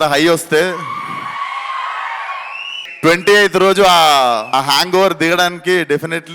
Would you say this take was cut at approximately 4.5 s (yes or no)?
yes